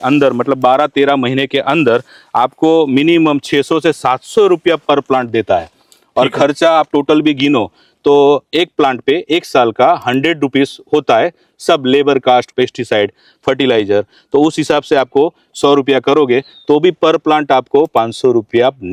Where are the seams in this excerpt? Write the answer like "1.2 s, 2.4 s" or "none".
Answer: none